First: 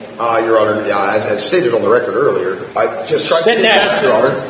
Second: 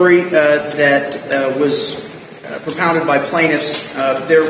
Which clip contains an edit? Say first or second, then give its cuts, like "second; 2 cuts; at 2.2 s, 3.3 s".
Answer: first; 1 cut; at 2.6 s